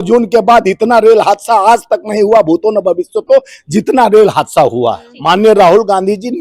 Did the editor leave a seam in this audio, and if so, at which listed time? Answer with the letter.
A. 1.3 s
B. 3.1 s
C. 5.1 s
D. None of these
C